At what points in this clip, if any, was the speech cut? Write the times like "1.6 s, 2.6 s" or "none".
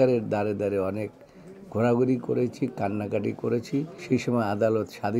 4.0 s